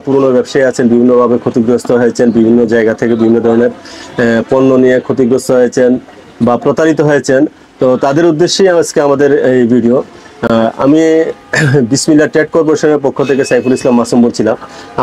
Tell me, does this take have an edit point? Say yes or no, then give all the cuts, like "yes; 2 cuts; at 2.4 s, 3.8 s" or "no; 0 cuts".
no; 0 cuts